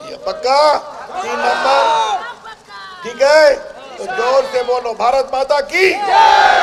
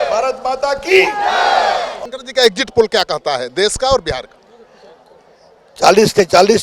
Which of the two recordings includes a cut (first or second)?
second